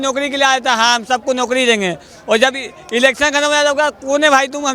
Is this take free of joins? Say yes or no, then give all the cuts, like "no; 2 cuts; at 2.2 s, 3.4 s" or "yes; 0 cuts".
yes; 0 cuts